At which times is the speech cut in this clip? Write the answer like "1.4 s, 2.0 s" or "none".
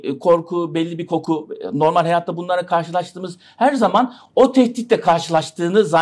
none